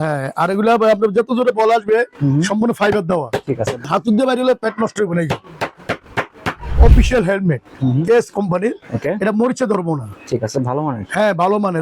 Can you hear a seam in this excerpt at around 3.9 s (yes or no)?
yes